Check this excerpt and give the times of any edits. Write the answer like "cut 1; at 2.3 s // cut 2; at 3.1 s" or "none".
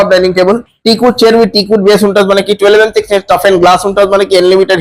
none